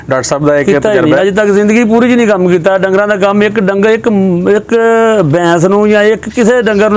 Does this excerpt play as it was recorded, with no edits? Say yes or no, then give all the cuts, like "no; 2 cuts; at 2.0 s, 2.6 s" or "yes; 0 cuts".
yes; 0 cuts